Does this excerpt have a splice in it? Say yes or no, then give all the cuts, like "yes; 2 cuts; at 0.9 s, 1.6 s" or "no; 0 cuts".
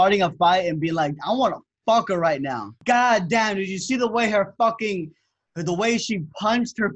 yes; 1 cut; at 2.7 s